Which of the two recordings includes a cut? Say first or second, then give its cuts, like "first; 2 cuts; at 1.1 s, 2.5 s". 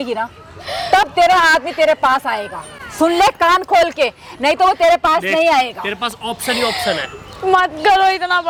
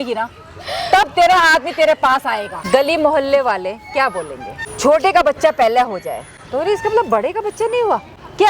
second; 2 cuts; at 2.5 s, 4.6 s